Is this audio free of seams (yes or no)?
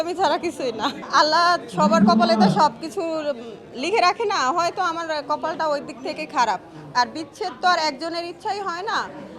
yes